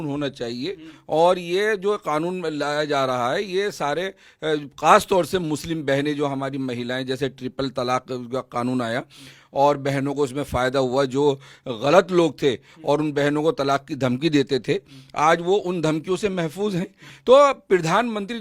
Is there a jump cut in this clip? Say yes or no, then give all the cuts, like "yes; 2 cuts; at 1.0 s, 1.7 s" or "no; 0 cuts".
no; 0 cuts